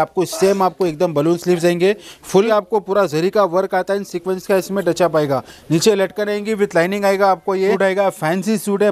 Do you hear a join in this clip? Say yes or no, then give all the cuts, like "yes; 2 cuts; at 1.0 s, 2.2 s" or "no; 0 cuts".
yes; 2 cuts; at 2.5 s, 7.8 s